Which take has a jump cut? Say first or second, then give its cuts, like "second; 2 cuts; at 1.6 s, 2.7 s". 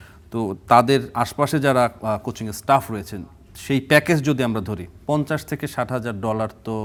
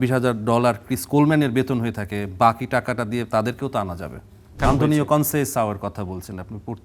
second; 1 cut; at 4.5 s